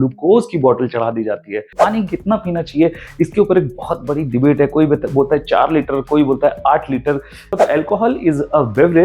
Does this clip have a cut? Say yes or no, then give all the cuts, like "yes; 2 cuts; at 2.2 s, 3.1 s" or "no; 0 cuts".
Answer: yes; 2 cuts; at 1.7 s, 7.6 s